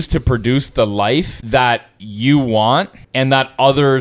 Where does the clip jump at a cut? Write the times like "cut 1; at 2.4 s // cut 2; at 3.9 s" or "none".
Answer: cut 1; at 1.4 s // cut 2; at 3.0 s